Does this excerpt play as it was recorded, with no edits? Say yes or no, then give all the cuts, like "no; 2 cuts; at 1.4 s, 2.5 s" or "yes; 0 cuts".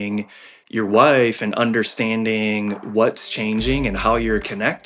yes; 0 cuts